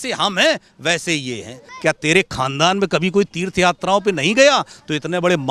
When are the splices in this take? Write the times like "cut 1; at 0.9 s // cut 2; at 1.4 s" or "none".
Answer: cut 1; at 1.6 s